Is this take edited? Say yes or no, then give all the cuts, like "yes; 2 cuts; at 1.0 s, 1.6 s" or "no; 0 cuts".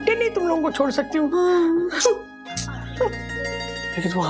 no; 0 cuts